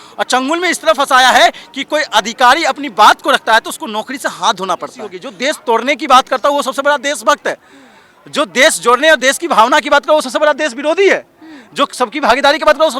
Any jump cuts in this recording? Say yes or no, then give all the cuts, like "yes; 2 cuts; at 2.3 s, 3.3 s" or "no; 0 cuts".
yes; 1 cut; at 5.2 s